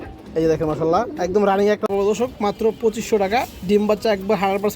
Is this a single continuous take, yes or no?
no